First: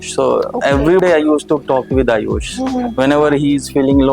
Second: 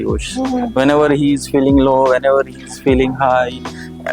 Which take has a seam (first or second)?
first